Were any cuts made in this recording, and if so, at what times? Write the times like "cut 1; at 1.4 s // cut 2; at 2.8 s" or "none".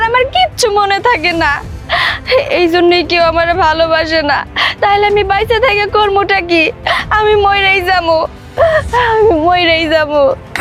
none